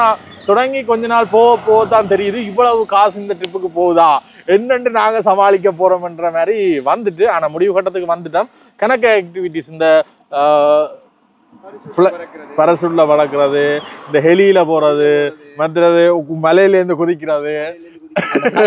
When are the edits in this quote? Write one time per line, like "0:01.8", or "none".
none